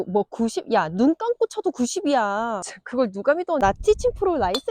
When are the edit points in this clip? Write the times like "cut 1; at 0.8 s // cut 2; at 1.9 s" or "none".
cut 1; at 2.8 s // cut 2; at 3.6 s